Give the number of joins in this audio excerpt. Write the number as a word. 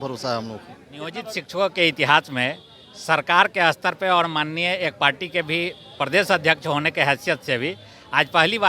one